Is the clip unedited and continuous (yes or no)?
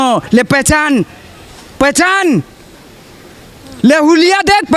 yes